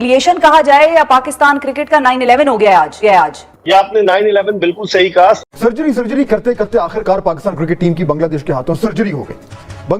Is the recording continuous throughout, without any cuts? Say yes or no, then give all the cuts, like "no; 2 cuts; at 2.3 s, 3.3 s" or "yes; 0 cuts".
no; 1 cut; at 5.4 s